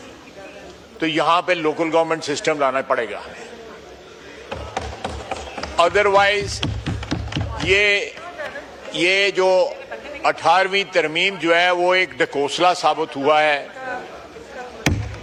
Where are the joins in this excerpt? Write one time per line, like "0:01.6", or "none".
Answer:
none